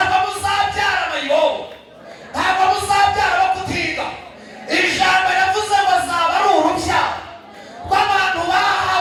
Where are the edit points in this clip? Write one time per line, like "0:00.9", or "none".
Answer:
none